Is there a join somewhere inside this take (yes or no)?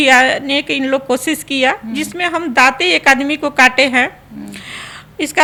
no